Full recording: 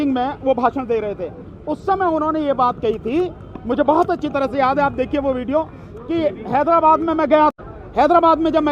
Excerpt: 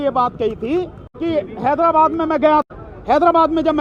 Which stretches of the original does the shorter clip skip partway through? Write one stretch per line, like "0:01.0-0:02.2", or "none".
0:03.5-0:05.9